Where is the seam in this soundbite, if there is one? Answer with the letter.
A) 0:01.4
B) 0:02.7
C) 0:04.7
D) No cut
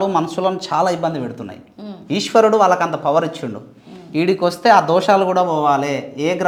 D